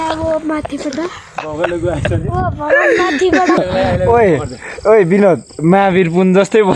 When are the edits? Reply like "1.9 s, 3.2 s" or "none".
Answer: 3.6 s